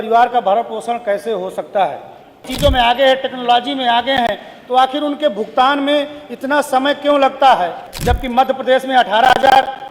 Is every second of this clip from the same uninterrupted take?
no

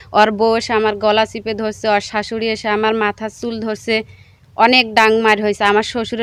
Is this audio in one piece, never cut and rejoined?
yes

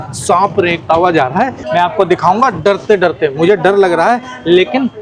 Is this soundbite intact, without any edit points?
no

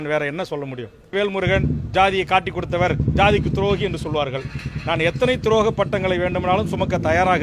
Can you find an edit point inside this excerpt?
yes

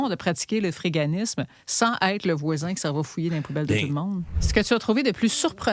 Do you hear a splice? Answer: yes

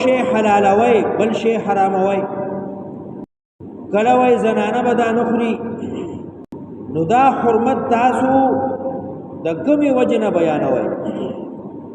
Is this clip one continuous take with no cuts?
no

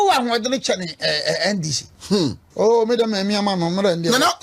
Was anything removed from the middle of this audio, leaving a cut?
yes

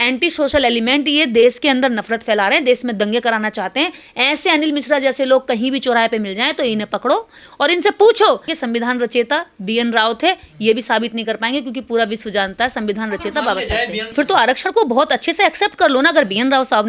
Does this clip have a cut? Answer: yes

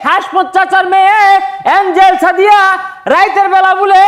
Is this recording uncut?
yes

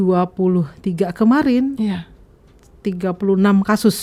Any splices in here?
no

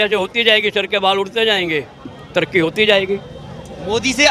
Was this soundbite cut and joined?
no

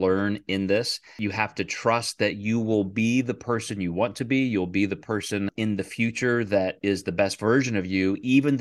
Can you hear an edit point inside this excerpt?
yes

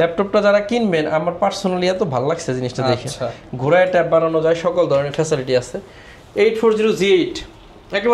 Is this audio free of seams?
yes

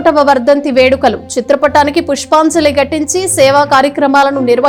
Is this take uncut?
yes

